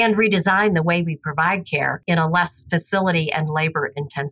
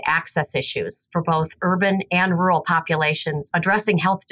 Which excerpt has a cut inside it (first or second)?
second